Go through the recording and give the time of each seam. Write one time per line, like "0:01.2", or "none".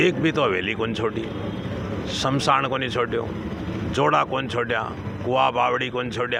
none